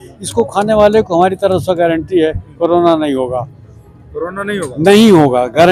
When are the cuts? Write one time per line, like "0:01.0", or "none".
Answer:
none